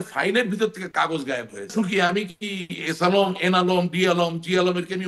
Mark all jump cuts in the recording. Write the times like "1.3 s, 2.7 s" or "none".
1.7 s